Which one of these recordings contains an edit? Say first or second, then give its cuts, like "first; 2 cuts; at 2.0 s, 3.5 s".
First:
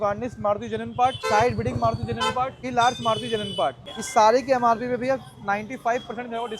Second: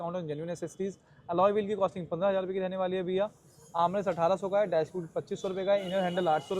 first; 3 cuts; at 1.2 s, 2.6 s, 3.8 s